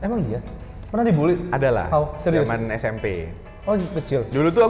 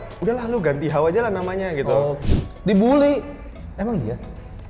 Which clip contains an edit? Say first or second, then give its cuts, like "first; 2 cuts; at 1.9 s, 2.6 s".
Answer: second; 1 cut; at 2.3 s